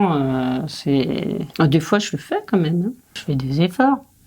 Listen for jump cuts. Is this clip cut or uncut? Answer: cut